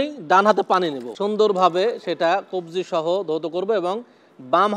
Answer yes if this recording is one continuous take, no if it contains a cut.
no